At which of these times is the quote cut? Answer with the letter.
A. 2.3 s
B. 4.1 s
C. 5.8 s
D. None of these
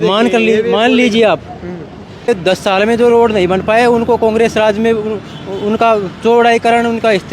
A